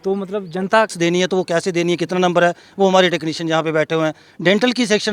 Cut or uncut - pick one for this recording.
cut